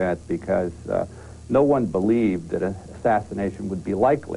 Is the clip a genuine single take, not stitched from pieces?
no; 1 cut; at 2.4 s

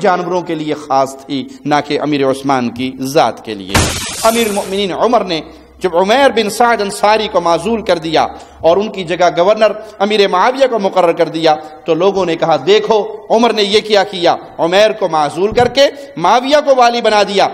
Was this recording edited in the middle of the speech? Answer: yes; 1 cut; at 4.0 s

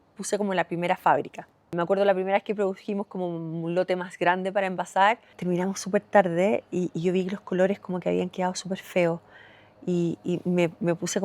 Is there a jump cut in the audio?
yes; 2 cuts; at 1.7 s, 5.3 s

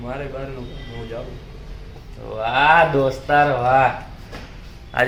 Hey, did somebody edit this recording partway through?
no; 0 cuts

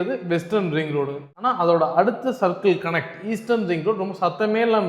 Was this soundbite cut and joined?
yes; 1 cut; at 1.2 s

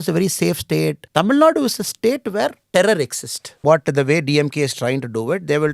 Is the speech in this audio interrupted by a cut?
yes; 3 cuts; at 1.0 s, 2.6 s, 3.6 s

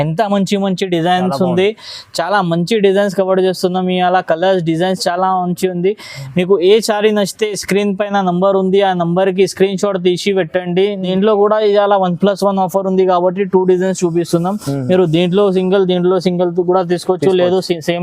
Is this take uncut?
no; 1 cut; at 11.1 s

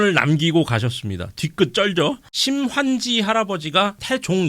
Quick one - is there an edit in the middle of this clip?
yes; 1 cut; at 2.3 s

